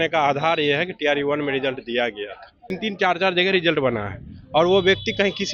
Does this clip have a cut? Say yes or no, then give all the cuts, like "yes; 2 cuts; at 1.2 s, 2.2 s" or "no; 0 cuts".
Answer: yes; 1 cut; at 2.8 s